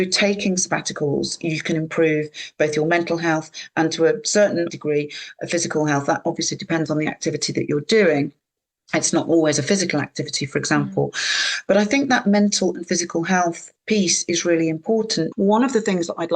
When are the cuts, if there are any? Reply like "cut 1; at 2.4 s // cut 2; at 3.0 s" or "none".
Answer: cut 1; at 4.7 s // cut 2; at 15.3 s